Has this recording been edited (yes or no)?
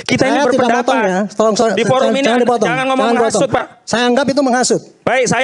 no